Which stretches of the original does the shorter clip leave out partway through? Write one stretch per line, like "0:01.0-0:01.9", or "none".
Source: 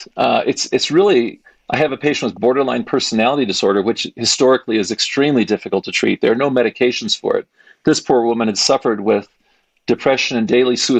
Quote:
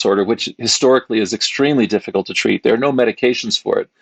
none